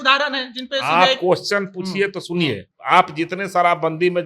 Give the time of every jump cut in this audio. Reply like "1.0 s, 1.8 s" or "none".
2.7 s